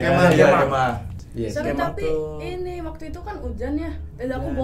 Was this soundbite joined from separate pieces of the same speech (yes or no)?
yes